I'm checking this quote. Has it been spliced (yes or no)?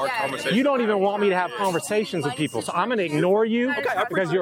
no